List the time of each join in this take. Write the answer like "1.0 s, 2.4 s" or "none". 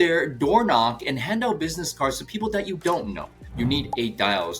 3.5 s